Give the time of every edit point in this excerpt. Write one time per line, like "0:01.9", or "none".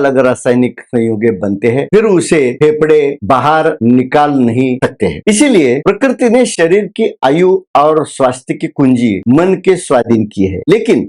none